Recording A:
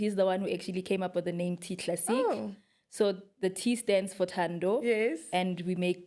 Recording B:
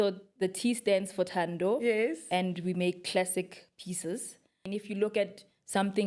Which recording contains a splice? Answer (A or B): B